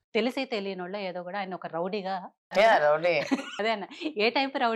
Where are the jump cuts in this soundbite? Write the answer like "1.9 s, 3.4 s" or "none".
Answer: 2.4 s, 3.5 s